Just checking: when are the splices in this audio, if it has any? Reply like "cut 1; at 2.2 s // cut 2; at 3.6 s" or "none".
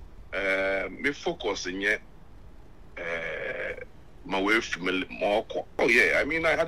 cut 1; at 5.7 s